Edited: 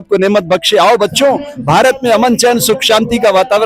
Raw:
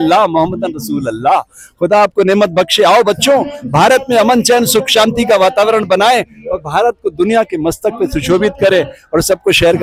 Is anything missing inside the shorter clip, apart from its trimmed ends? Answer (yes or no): no